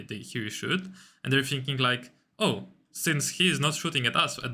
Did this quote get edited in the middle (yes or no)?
no